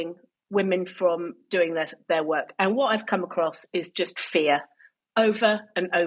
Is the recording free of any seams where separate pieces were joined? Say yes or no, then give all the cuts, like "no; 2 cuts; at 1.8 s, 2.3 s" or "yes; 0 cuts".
yes; 0 cuts